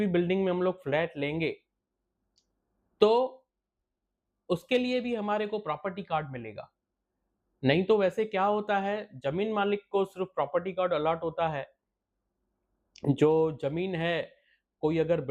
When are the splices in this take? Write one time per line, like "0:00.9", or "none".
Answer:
none